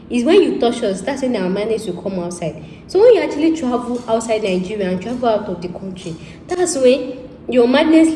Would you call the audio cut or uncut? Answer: uncut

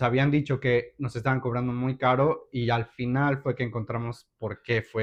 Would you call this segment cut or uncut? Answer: uncut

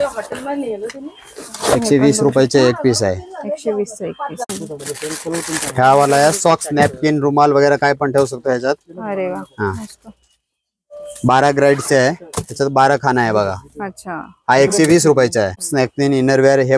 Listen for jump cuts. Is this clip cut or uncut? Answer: cut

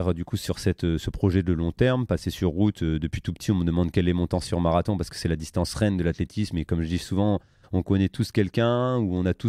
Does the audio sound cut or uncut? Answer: uncut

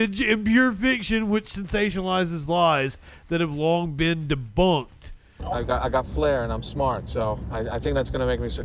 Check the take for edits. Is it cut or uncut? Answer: cut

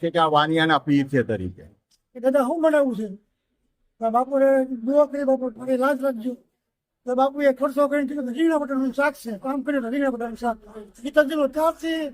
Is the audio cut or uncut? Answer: cut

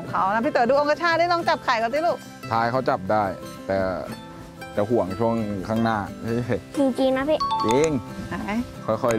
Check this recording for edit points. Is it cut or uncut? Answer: uncut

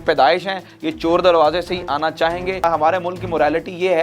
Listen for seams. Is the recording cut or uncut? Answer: cut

